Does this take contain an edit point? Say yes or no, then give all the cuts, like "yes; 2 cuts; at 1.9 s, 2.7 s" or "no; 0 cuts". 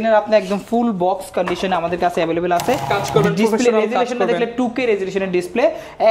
yes; 1 cut; at 2.9 s